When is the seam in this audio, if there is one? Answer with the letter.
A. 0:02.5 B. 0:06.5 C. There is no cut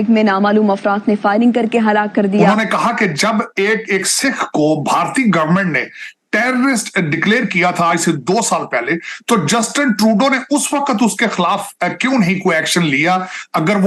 A